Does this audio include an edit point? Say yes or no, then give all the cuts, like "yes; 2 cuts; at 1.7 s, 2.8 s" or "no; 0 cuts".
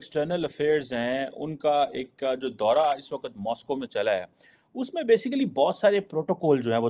no; 0 cuts